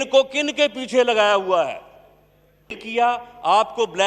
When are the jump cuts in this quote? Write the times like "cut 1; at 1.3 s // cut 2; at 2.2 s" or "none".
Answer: cut 1; at 2.8 s